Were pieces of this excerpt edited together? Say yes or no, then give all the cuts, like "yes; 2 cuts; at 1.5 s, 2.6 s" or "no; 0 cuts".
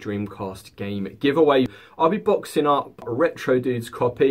yes; 2 cuts; at 1.7 s, 3.0 s